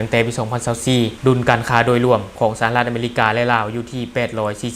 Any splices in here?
yes; 1 cut; at 1.2 s

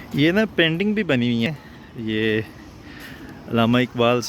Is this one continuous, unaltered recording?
yes; 0 cuts

